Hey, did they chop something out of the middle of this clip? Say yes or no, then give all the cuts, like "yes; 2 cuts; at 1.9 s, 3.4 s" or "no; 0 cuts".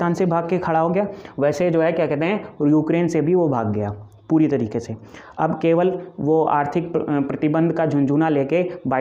no; 0 cuts